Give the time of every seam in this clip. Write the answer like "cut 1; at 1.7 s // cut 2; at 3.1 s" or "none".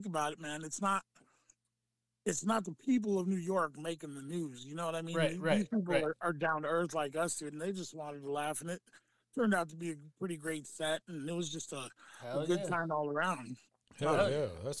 none